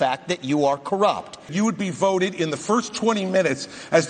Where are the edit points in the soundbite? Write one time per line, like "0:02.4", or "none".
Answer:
0:01.5